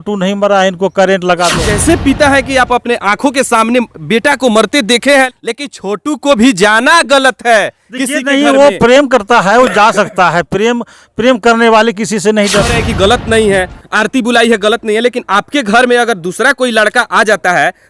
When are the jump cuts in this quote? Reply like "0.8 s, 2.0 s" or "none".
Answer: 1.6 s, 5.3 s, 12.7 s